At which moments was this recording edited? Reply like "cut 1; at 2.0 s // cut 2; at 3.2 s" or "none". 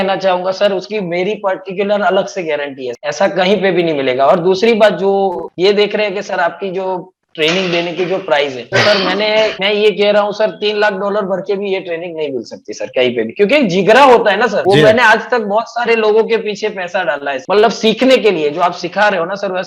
none